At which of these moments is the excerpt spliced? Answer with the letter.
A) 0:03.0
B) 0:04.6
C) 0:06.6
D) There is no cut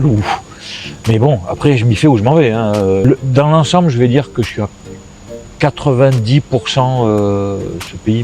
A